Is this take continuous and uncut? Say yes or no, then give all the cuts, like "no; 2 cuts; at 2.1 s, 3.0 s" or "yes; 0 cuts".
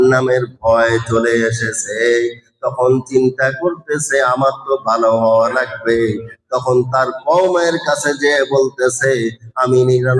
yes; 0 cuts